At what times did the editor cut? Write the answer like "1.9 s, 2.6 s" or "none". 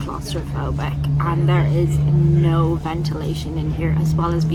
none